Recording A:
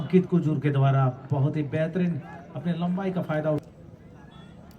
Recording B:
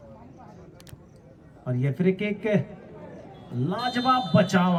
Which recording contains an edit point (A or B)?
A